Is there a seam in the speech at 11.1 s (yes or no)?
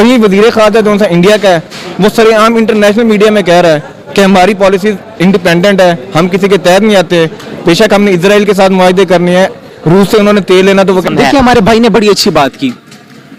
yes